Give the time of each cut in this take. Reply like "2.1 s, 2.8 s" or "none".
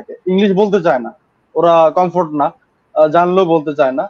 none

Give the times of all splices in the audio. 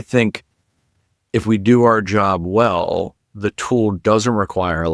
none

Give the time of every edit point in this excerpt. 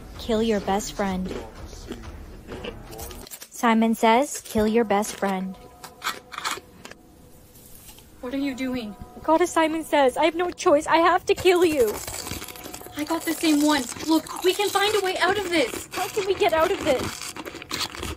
3.5 s

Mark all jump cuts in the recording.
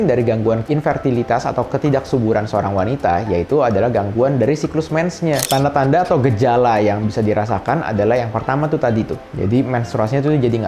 5.4 s

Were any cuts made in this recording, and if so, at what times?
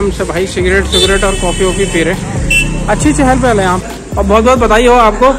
3.9 s

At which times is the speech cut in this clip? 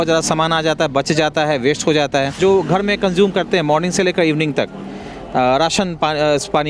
2.4 s

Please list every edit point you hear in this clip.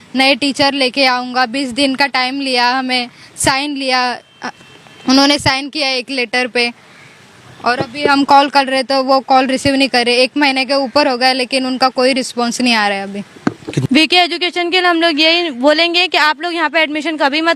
13.8 s

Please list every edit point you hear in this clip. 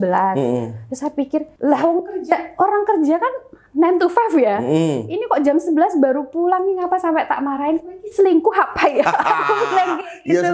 1.5 s

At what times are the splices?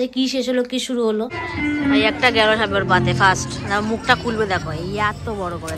1.4 s

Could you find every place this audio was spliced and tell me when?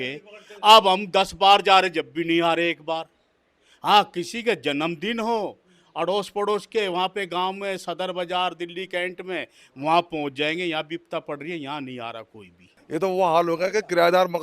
12.7 s

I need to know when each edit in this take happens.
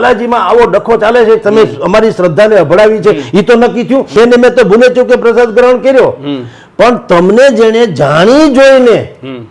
4.1 s

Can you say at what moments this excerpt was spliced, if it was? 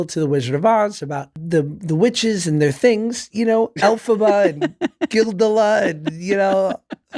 1.4 s

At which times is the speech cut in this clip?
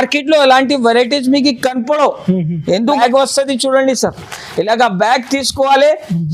3.0 s

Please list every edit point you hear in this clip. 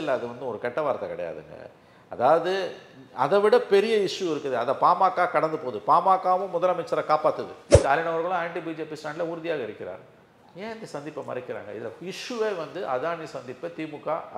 7.6 s

